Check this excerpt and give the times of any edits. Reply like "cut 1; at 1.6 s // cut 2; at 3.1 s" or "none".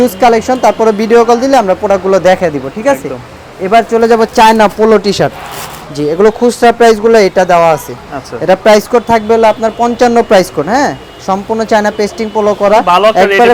none